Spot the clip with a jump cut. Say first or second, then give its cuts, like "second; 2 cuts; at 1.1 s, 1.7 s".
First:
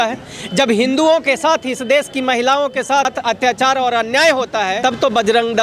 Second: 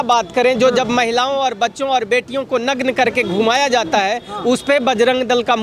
first; 2 cuts; at 3.1 s, 4.8 s